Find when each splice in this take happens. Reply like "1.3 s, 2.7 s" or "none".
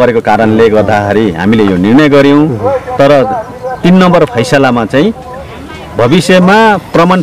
none